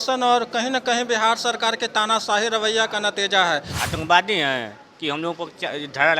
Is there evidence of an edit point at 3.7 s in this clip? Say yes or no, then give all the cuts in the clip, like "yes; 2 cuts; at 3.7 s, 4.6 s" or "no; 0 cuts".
yes; 1 cut; at 3.7 s